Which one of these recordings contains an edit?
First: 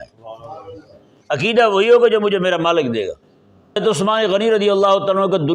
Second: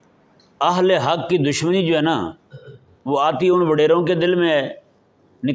first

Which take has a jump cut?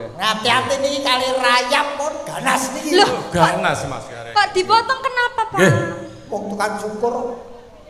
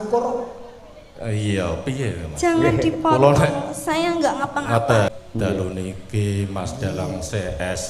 second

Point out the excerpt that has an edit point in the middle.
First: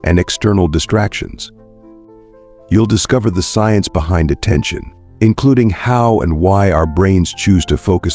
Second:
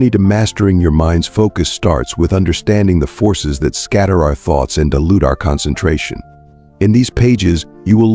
first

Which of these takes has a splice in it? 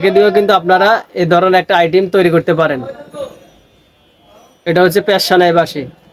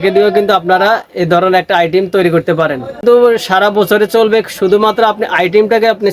second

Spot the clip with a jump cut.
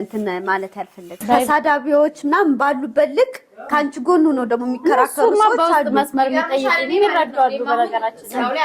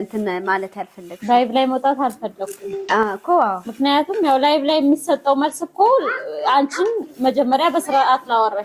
first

